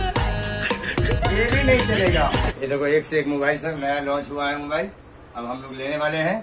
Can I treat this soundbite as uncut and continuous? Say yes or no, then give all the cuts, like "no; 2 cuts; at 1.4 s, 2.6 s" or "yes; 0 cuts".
no; 1 cut; at 2.5 s